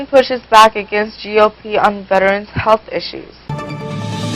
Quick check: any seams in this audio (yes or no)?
no